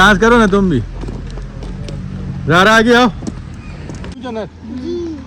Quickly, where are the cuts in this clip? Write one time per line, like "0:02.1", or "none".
0:04.2